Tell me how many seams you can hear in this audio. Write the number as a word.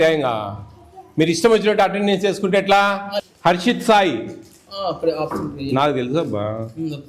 one